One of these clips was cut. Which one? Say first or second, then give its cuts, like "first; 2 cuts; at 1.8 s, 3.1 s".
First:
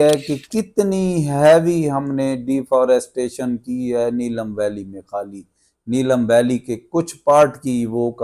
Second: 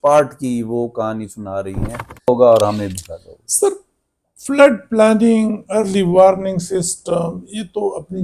second; 1 cut; at 2.3 s